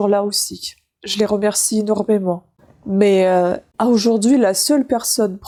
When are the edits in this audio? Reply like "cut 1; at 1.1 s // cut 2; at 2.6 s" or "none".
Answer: none